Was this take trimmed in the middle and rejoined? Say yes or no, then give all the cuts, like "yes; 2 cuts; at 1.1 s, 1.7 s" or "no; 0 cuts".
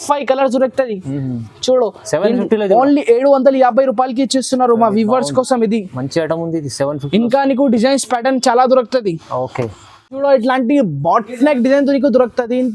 no; 0 cuts